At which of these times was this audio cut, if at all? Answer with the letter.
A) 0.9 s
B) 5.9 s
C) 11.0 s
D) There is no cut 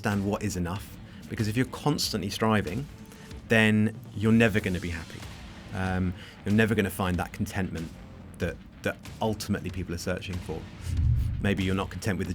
C